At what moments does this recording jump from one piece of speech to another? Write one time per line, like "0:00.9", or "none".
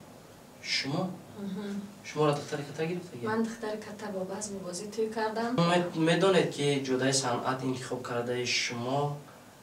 0:05.6